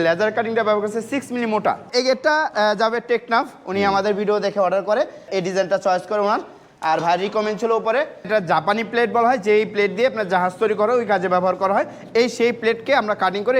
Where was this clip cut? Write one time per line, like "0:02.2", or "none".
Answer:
0:01.9
0:05.3
0:08.3